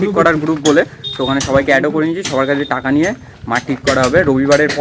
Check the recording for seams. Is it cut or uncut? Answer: uncut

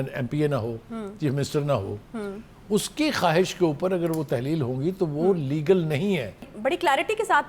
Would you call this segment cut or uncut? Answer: cut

